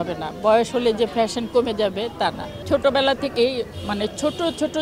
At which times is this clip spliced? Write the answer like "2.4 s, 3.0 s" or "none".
2.6 s